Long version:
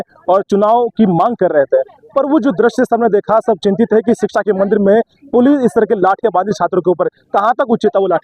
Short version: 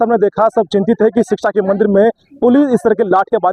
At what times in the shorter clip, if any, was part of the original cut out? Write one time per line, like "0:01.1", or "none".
none